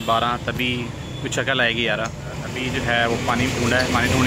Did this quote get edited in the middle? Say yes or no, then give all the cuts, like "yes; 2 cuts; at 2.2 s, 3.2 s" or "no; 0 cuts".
yes; 1 cut; at 2.5 s